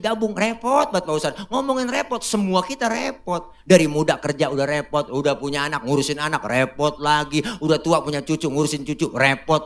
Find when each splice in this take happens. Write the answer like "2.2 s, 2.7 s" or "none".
none